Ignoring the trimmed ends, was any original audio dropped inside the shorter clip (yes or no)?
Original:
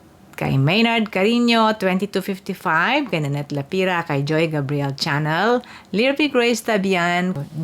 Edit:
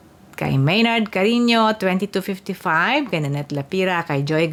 no